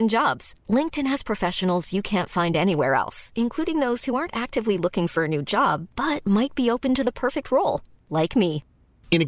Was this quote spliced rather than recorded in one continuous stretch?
no; 0 cuts

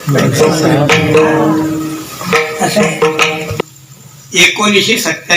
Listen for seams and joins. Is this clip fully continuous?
no; 1 cut; at 3.5 s

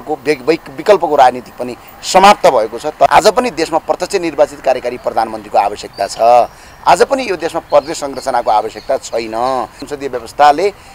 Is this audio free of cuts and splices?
no; 2 cuts; at 3.1 s, 9.8 s

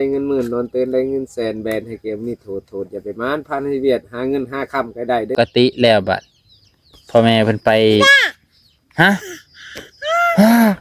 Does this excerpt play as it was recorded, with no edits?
no; 1 cut; at 5.3 s

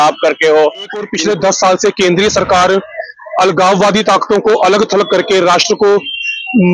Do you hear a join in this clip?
yes; 1 cut; at 1.1 s

